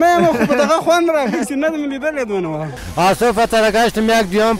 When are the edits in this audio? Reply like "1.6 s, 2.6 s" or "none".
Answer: 2.8 s